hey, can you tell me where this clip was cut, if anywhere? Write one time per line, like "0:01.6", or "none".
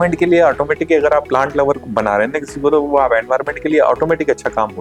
none